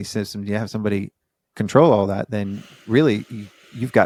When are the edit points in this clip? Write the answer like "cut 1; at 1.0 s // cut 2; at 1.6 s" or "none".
none